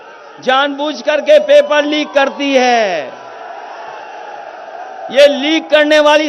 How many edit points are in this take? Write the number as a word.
zero